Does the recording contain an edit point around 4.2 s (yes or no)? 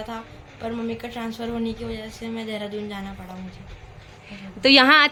no